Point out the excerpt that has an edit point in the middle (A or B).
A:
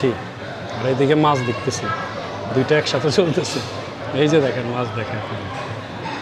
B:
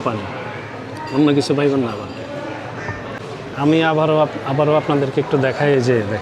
B